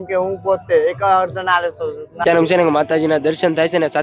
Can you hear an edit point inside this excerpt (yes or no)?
yes